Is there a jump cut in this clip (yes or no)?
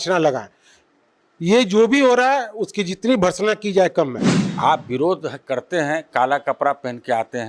yes